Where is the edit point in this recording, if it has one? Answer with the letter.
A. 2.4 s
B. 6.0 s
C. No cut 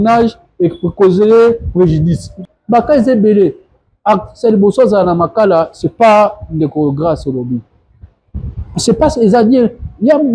A